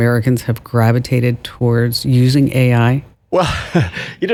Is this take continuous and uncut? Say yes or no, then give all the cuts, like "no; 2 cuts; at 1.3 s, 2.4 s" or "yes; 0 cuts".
yes; 0 cuts